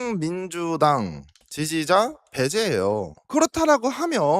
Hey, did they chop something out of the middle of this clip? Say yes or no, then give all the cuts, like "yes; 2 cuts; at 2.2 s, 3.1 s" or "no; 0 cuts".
yes; 1 cut; at 3.2 s